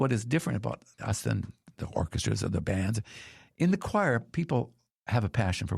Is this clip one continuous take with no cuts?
no; 1 cut; at 0.9 s

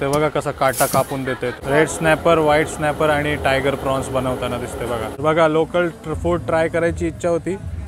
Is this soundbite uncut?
no; 2 cuts; at 1.6 s, 5.1 s

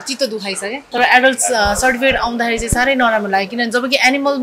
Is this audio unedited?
no; 1 cut; at 1.0 s

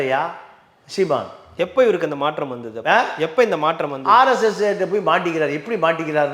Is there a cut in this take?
no; 0 cuts

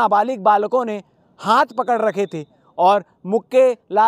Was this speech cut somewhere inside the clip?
no; 0 cuts

